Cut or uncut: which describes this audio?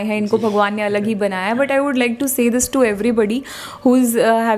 uncut